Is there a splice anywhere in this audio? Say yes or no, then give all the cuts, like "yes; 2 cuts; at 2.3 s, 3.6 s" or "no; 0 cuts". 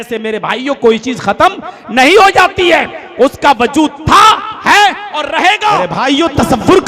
yes; 1 cut; at 6.0 s